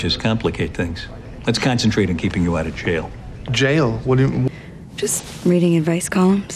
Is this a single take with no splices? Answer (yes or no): yes